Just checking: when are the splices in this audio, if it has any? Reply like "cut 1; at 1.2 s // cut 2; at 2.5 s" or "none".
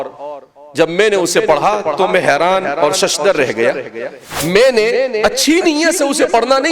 cut 1; at 4.3 s